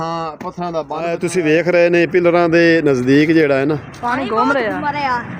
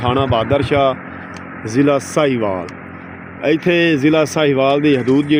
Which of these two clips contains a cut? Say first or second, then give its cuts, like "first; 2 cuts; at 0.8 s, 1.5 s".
first; 1 cut; at 0.9 s